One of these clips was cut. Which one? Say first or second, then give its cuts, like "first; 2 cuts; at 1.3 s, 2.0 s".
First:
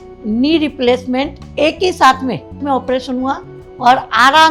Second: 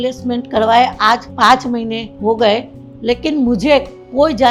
first; 1 cut; at 2.6 s